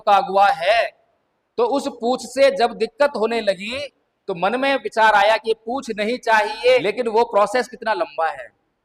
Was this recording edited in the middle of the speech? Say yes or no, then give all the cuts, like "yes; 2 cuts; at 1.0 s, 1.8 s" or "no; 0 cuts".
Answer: yes; 1 cut; at 6.8 s